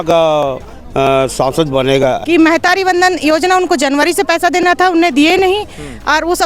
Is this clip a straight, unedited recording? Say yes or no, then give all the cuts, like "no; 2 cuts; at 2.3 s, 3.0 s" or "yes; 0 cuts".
no; 1 cut; at 2.2 s